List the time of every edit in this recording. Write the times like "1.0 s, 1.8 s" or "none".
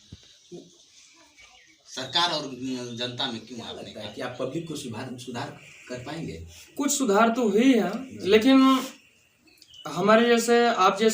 4.0 s